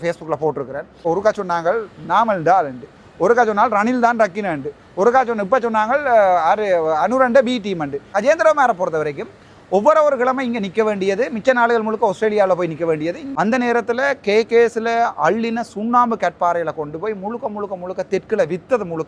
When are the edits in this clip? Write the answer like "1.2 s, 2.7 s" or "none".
1.0 s, 8.1 s, 13.2 s